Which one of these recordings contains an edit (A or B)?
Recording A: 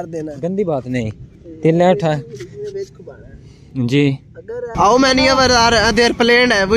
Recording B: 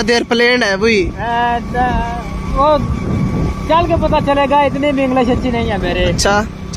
A